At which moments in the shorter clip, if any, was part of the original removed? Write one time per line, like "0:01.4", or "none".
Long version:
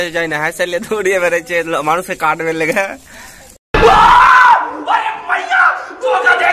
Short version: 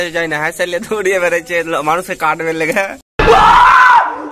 0:03.0